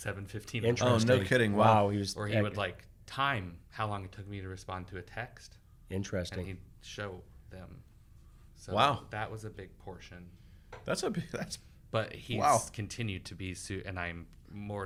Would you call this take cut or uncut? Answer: uncut